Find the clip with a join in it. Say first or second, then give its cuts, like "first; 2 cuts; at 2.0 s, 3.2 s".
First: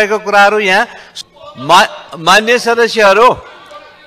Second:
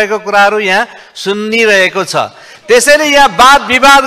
first; 1 cut; at 1.0 s